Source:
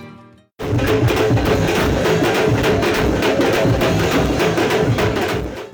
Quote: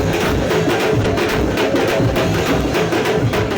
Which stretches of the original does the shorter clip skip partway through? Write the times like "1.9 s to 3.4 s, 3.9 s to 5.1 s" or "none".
2.6 s to 2.7 s